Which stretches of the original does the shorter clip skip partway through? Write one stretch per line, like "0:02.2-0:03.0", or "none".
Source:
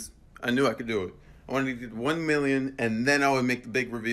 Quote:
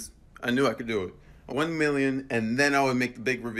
0:01.4-0:01.9